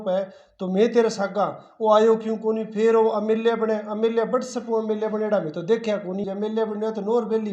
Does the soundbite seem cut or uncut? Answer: cut